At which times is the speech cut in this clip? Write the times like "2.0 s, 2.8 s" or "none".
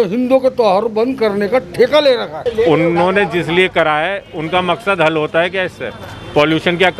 2.4 s